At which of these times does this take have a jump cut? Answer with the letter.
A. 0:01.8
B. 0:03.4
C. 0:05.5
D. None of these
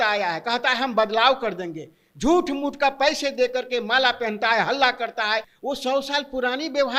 C